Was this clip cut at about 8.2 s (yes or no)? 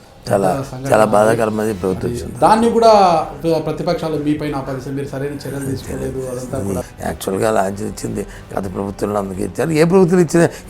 no